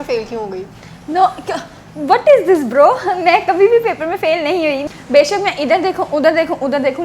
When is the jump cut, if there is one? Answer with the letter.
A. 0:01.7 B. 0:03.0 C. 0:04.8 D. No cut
C